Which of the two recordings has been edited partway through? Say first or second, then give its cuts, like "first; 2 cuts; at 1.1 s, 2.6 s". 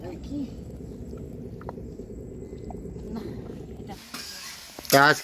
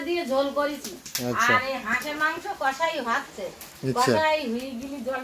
first; 1 cut; at 3.9 s